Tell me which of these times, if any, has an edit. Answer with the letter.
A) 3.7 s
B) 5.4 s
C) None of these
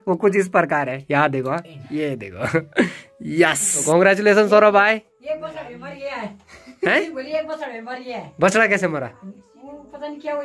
A